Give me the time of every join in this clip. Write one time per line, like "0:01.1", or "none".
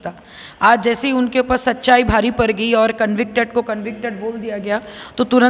none